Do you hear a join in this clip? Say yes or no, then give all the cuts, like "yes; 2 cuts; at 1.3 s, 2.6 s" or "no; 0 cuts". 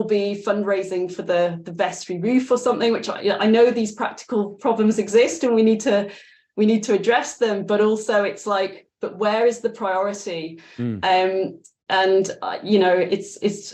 no; 0 cuts